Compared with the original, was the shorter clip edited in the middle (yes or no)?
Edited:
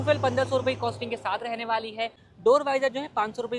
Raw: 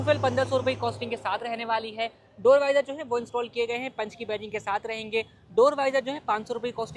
yes